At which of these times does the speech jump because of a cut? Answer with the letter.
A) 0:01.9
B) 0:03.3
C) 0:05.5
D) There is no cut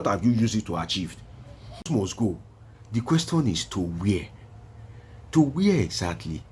A